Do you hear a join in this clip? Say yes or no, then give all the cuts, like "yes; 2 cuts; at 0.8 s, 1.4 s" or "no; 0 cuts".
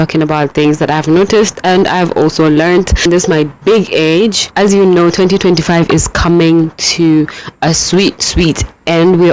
yes; 2 cuts; at 3.0 s, 4.5 s